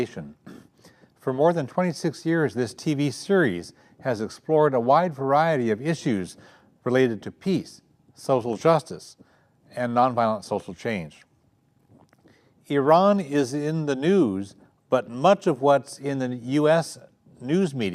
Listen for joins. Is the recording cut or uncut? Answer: uncut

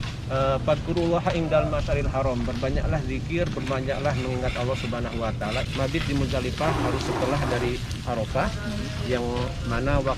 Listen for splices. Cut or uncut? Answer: cut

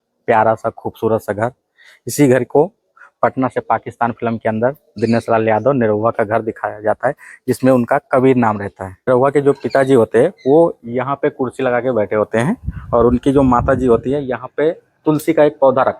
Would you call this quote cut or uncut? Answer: cut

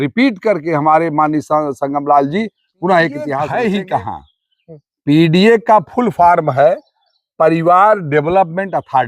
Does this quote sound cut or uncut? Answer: cut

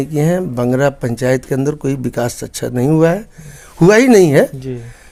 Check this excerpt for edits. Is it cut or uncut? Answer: uncut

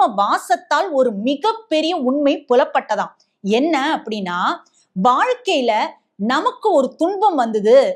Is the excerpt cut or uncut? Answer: uncut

